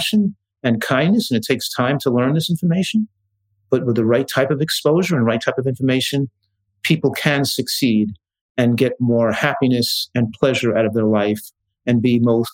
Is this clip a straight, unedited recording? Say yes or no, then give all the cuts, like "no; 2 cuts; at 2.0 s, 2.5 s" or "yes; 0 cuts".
yes; 0 cuts